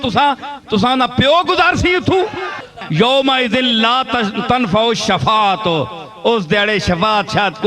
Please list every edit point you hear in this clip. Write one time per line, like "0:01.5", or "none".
0:02.8